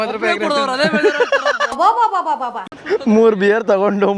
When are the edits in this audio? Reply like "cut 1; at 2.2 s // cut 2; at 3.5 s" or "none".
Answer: cut 1; at 2.7 s